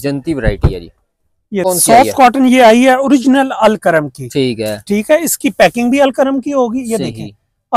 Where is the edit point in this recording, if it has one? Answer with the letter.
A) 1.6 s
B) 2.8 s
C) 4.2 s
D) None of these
A